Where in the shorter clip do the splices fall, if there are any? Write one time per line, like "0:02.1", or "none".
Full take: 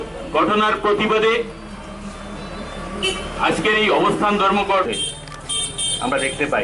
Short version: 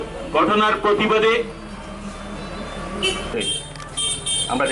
0:03.3